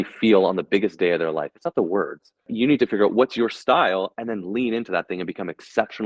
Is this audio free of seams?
no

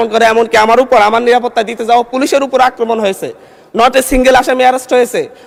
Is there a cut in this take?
no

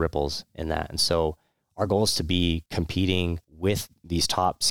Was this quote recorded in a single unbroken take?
no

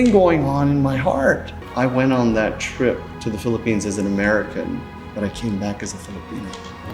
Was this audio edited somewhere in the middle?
yes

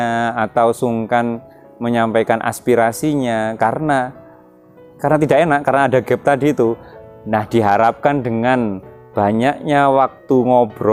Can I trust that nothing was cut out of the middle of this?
yes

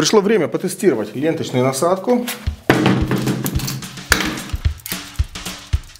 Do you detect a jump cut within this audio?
no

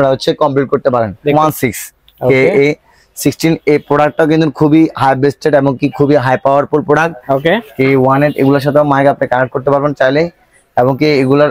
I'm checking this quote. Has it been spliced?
yes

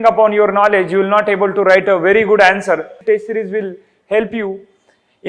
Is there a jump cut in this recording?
yes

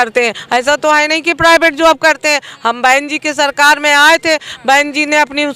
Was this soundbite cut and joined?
no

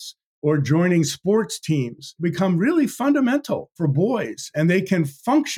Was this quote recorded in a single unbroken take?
no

